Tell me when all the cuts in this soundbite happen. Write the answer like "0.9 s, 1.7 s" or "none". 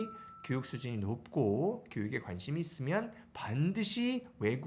none